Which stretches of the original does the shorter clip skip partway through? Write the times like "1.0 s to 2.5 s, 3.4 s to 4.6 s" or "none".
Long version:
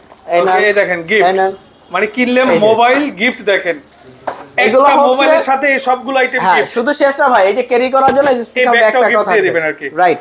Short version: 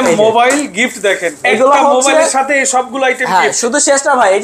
3.8 s to 4.5 s